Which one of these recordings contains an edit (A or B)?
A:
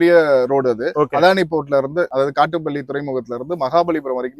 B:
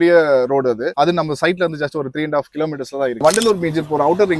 B